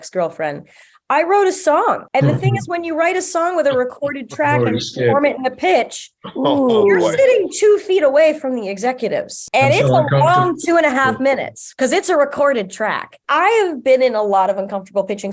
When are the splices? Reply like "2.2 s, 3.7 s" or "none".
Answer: 2.0 s, 9.4 s, 13.2 s